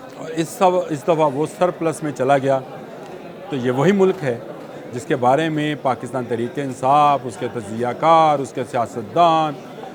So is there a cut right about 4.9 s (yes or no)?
no